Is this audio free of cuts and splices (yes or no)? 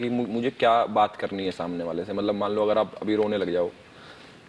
yes